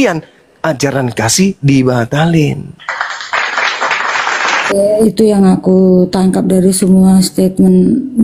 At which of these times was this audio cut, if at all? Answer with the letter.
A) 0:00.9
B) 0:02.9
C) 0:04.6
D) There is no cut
C